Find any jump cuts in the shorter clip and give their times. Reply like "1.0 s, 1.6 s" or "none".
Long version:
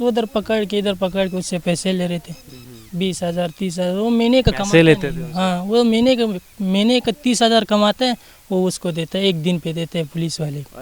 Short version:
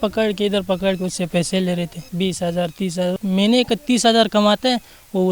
2.0 s, 3.1 s